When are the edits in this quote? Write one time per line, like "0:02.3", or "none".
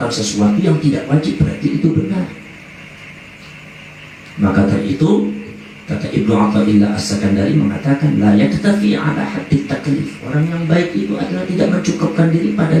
none